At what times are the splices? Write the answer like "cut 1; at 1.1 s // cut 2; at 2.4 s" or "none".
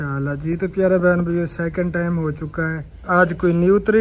cut 1; at 2.9 s